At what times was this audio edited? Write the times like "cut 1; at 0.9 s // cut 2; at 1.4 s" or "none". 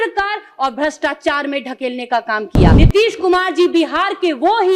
cut 1; at 2.7 s